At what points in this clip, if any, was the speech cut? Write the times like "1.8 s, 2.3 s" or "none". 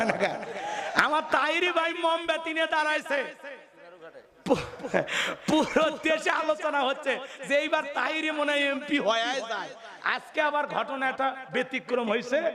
none